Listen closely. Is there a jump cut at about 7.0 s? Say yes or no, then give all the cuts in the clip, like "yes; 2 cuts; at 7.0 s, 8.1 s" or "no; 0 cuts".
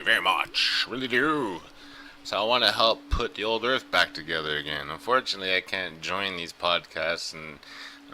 yes; 1 cut; at 7.0 s